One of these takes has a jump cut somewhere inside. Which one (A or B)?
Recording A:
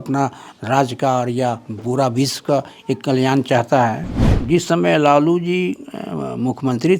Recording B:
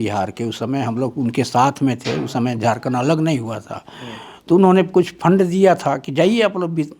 A